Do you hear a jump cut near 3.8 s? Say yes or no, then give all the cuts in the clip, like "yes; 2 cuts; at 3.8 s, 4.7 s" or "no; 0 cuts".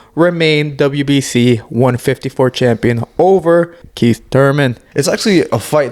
yes; 2 cuts; at 3.8 s, 4.8 s